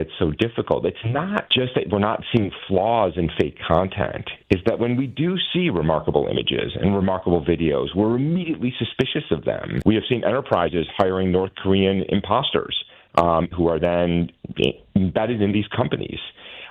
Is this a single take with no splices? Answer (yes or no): no